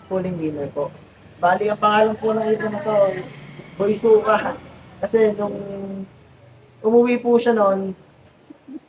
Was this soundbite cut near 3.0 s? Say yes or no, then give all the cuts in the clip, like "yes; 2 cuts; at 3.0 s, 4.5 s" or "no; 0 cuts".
no; 0 cuts